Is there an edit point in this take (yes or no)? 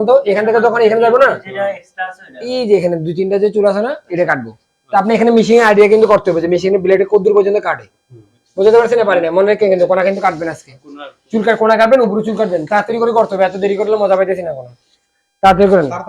no